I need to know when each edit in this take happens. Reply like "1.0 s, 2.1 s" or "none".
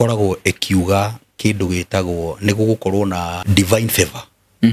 3.4 s